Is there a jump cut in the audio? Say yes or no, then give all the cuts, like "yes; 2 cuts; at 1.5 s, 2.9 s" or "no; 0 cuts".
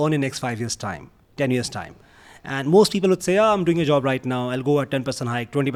no; 0 cuts